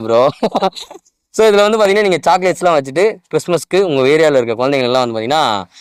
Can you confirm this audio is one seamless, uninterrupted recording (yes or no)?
yes